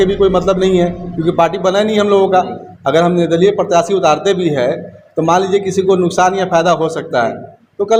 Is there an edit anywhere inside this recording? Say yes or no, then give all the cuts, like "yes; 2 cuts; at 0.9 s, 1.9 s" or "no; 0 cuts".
no; 0 cuts